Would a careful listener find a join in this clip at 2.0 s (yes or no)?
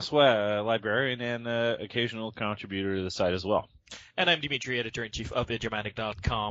no